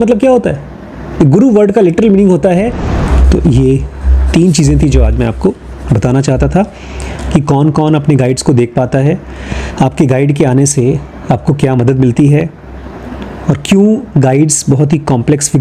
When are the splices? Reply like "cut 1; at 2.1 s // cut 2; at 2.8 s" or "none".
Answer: cut 1; at 2.9 s